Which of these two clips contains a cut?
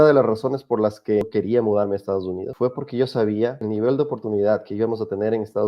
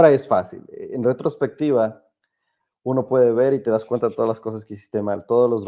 first; 3 cuts; at 1.2 s, 2.5 s, 3.6 s

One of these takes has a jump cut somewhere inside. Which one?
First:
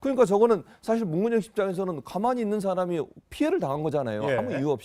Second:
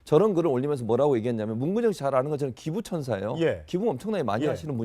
second; 1 cut; at 2.5 s

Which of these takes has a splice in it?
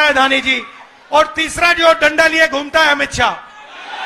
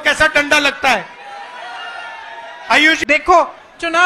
second; 1 cut; at 3.0 s

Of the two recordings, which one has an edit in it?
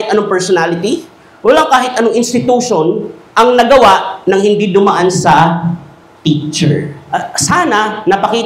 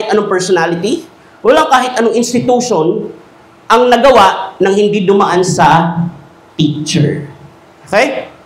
first; 2 cuts; at 3.2 s, 7.0 s

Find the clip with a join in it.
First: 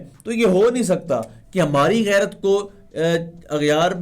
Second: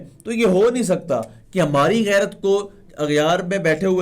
second; 1 cut; at 2.8 s

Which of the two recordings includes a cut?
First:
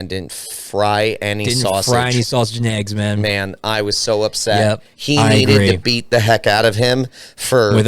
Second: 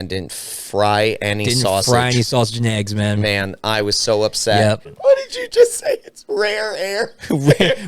second; 1 cut; at 4.9 s

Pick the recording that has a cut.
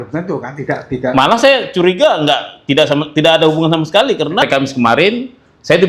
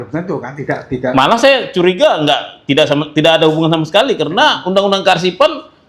first; 1 cut; at 4.4 s

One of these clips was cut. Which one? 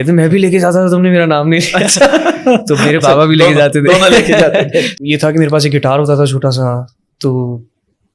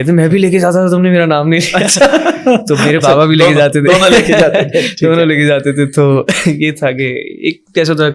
first; 1 cut; at 4.9 s

